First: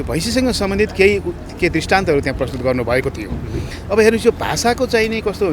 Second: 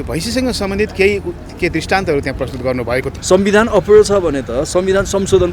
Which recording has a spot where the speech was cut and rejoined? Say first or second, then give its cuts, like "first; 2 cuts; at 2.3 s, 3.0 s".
second; 1 cut; at 3.1 s